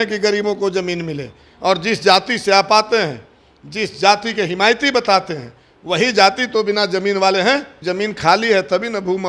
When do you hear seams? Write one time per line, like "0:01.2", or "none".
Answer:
0:07.7

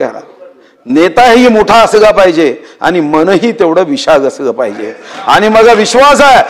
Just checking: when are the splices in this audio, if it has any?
none

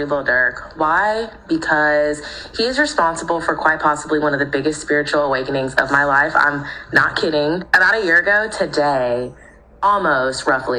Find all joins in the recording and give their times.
0:05.4

